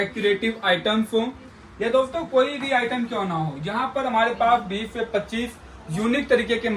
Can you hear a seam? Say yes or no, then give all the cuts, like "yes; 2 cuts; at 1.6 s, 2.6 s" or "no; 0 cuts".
no; 0 cuts